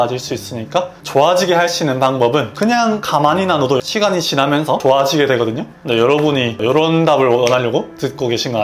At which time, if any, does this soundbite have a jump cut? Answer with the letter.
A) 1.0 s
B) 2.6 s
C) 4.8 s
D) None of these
A